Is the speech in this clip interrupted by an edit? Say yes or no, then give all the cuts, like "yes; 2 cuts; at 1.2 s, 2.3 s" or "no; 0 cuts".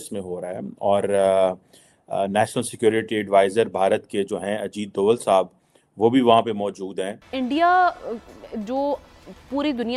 yes; 1 cut; at 7.3 s